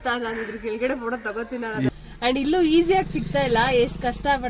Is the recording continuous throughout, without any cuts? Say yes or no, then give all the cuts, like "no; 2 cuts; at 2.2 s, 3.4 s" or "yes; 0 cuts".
no; 1 cut; at 1.9 s